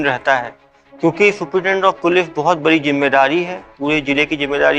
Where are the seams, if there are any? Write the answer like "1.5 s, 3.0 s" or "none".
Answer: none